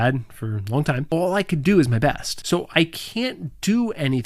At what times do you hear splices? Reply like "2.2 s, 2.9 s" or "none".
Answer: 1.0 s, 2.3 s